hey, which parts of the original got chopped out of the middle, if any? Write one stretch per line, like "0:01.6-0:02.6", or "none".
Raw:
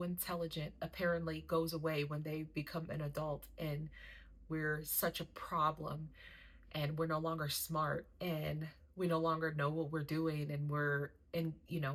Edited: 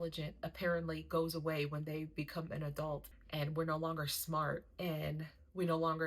0:03.5-0:06.5